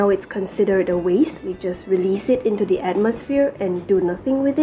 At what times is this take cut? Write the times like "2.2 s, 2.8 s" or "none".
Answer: none